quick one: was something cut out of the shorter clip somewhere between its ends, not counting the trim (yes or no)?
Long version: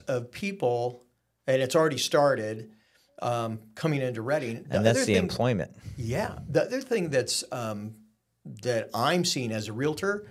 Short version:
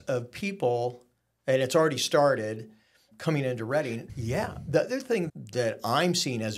yes